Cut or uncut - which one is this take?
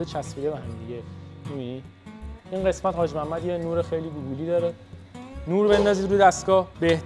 cut